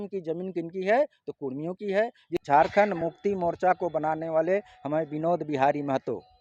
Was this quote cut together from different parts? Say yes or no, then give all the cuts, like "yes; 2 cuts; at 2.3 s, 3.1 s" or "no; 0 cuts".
yes; 1 cut; at 2.4 s